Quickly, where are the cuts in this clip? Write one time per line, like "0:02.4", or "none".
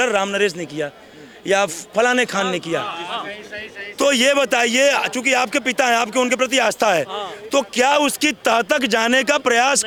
none